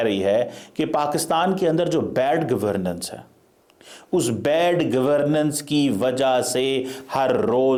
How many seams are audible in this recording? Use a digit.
0